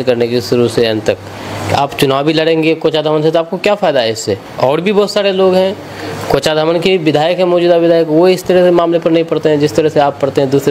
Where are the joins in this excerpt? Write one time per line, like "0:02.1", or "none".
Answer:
none

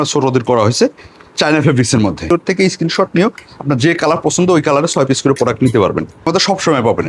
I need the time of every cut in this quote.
0:02.3
0:06.1

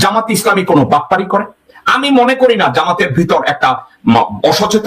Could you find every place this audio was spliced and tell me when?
none

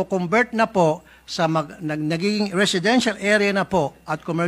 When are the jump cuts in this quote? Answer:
none

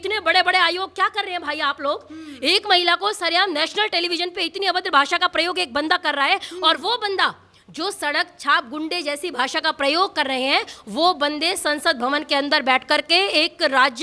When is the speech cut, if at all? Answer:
none

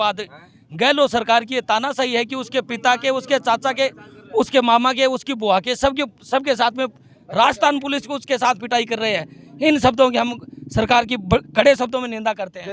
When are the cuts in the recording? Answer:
none

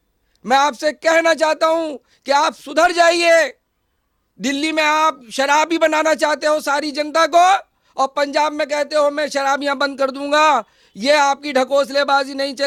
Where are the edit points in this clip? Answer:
none

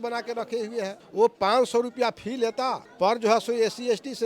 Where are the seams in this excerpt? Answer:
0:01.0
0:02.8

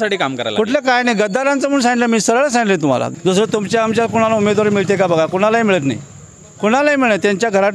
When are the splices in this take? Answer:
0:03.1

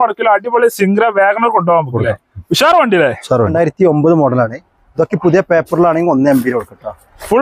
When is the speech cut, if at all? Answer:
0:03.5

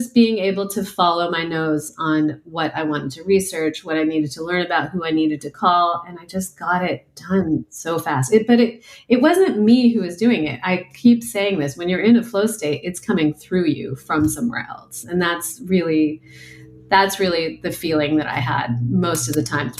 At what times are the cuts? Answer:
none

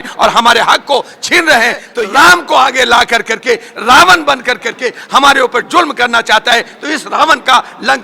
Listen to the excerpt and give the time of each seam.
0:01.9

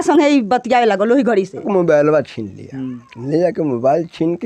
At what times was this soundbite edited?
0:01.6

